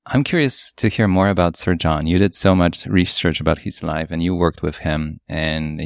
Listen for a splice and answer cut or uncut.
uncut